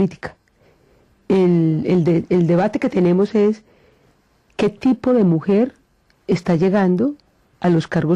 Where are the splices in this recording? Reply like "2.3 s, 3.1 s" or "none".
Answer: none

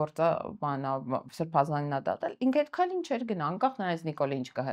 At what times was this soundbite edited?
none

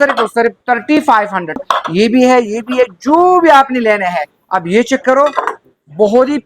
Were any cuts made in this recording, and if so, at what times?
1.6 s

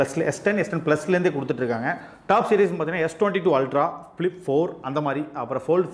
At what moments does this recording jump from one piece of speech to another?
none

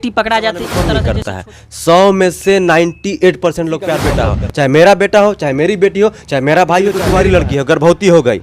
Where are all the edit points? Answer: 0.9 s, 4.1 s, 7.0 s

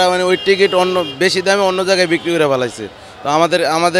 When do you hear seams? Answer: none

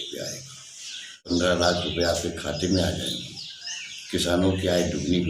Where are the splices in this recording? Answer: 1.3 s

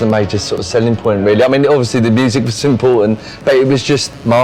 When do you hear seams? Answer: none

